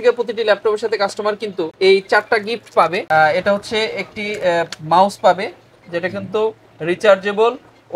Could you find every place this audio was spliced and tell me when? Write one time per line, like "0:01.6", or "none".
none